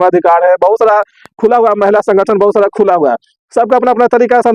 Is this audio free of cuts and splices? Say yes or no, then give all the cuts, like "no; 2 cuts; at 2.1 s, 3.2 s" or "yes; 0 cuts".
yes; 0 cuts